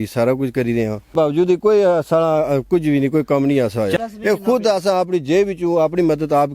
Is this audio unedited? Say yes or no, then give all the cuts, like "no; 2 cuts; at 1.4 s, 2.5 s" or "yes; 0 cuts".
no; 2 cuts; at 1.1 s, 4.0 s